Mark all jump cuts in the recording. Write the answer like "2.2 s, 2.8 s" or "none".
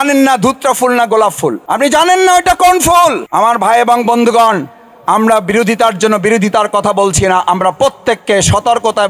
1.6 s, 3.2 s